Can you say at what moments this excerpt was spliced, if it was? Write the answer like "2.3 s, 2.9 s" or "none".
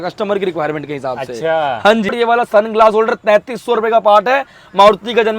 2.1 s